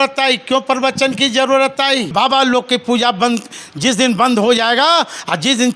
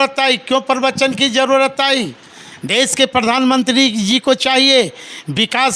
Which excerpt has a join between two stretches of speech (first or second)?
first